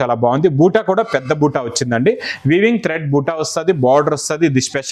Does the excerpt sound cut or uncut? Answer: uncut